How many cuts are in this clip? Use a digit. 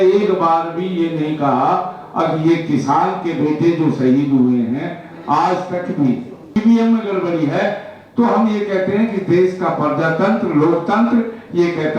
1